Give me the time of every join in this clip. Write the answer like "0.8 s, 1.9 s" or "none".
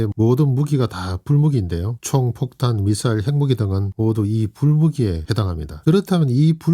5.7 s